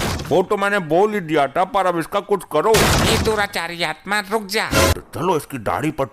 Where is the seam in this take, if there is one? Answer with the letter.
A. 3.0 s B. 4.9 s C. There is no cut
B